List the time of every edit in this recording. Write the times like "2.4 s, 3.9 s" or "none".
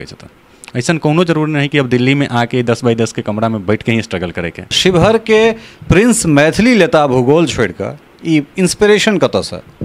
4.8 s